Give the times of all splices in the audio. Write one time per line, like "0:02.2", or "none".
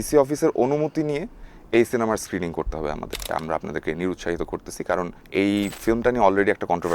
0:03.3
0:05.2